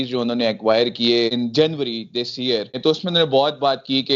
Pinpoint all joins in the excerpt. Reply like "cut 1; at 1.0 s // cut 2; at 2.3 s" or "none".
cut 1; at 1.3 s // cut 2; at 2.8 s